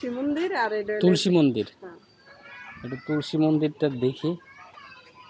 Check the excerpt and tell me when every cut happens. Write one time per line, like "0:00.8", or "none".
none